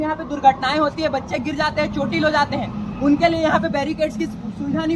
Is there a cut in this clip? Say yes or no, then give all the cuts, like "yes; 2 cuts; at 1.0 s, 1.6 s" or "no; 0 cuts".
no; 0 cuts